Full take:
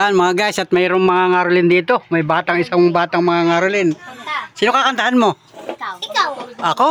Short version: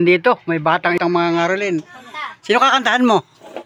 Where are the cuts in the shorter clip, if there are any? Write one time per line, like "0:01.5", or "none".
0:01.0